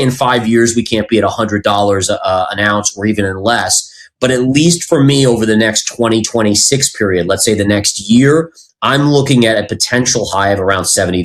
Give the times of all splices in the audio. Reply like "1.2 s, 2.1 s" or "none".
none